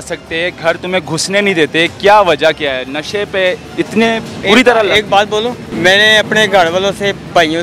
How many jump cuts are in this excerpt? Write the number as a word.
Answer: two